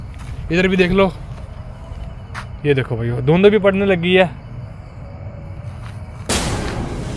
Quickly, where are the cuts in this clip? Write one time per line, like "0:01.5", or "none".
0:06.3

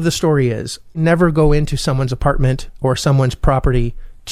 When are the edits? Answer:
0:01.0

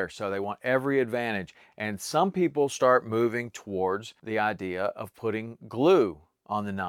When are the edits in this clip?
0:04.1

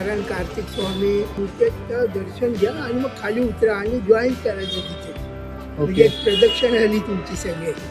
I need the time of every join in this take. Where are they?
0:01.3

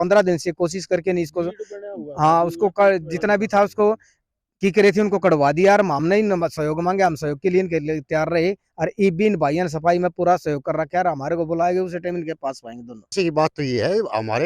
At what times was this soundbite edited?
0:13.1

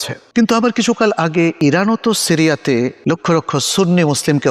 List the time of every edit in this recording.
0:01.6
0:03.0

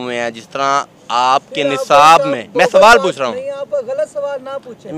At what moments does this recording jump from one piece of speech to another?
none

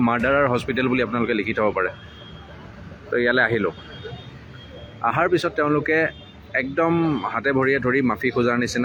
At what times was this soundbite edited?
none

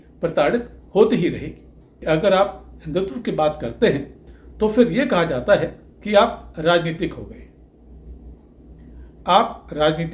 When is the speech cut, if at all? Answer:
0:01.9

